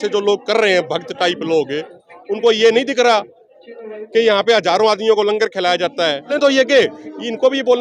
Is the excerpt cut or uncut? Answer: cut